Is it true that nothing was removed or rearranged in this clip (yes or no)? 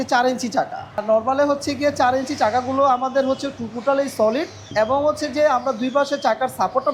no